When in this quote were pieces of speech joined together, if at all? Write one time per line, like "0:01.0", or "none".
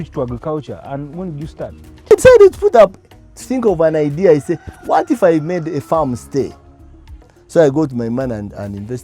0:02.1